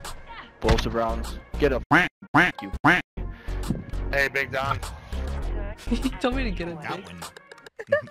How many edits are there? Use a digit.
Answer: 0